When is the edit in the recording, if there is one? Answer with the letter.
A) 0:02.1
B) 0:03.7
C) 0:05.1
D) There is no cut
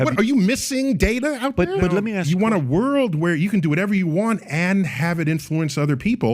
A